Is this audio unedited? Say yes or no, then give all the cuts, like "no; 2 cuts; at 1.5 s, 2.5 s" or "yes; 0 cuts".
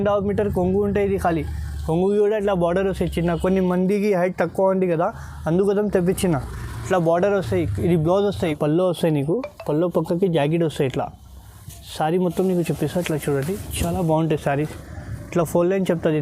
no; 1 cut; at 8.6 s